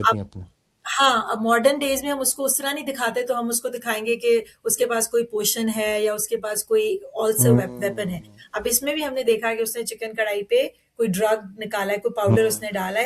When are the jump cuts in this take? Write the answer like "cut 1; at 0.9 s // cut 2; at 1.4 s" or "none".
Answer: none